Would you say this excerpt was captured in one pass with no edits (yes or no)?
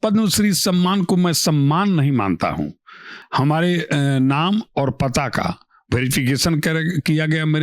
no